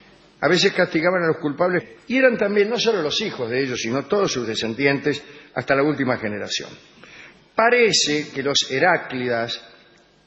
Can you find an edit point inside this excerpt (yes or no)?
no